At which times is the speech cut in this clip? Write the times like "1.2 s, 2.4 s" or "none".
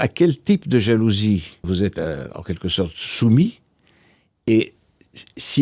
1.6 s

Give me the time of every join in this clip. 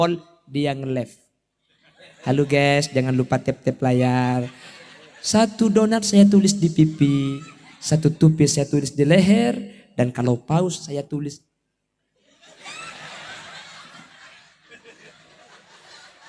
none

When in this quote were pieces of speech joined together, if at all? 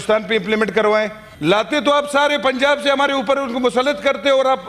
1.2 s

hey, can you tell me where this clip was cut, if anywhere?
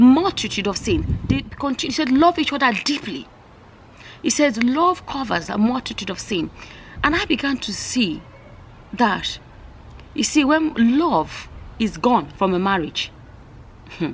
none

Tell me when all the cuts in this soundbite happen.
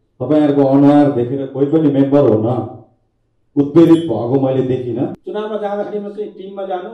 5.2 s

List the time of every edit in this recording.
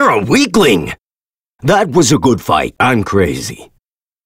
none

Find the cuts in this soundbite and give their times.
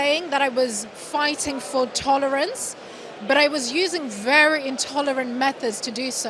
none

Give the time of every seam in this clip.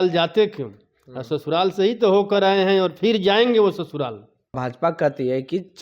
4.6 s

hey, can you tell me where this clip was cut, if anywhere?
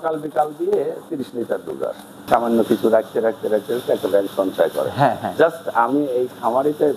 2.2 s

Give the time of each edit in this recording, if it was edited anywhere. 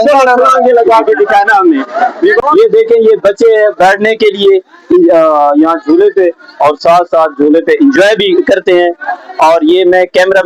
2.4 s

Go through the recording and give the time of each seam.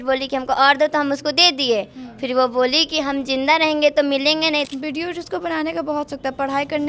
4.6 s

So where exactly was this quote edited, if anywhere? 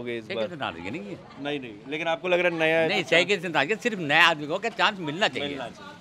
none

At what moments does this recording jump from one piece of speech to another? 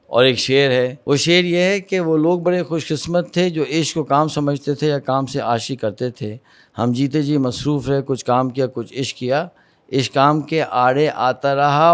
1.0 s

